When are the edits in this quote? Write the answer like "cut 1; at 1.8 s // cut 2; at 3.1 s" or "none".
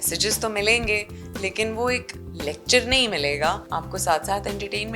cut 1; at 3.6 s

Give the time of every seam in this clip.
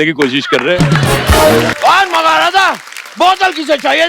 cut 1; at 1.7 s

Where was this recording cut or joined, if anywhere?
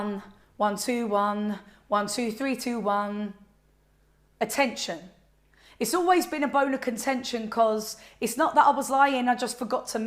none

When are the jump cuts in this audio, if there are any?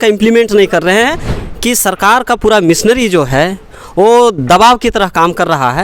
cut 1; at 1.3 s

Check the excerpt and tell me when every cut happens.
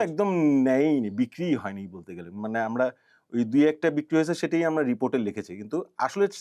none

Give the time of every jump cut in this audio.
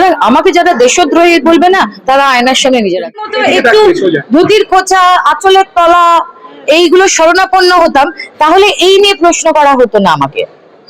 cut 1; at 3.1 s

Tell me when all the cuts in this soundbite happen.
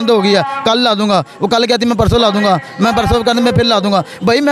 none

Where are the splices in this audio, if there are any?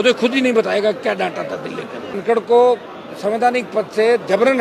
cut 1; at 2.2 s

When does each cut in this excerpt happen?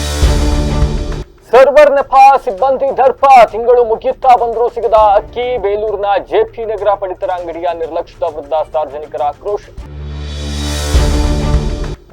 cut 1; at 1.2 s

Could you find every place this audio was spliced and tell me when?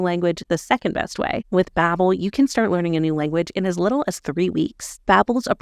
cut 1; at 1.4 s

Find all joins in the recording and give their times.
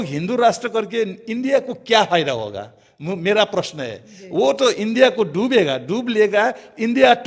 none

